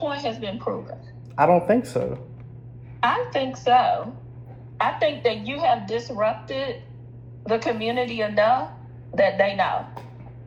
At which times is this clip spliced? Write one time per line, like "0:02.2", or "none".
none